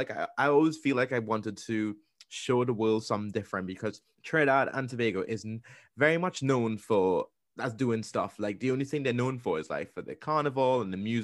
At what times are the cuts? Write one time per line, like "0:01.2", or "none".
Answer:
0:04.1
0:07.4